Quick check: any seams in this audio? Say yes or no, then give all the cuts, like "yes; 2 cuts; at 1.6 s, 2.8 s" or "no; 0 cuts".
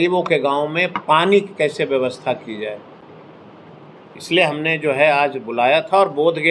no; 0 cuts